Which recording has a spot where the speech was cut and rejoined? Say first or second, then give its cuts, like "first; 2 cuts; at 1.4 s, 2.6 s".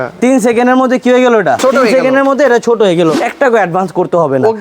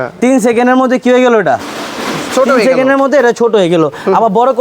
first; 2 cuts; at 1.6 s, 3.2 s